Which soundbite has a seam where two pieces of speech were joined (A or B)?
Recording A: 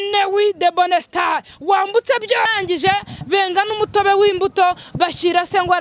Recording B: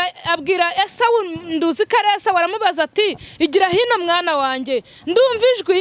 A